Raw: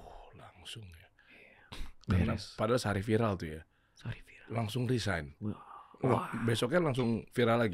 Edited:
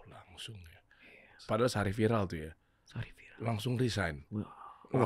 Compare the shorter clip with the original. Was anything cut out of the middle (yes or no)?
yes